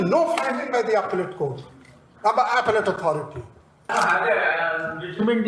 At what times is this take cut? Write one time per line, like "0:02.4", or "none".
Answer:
0:03.9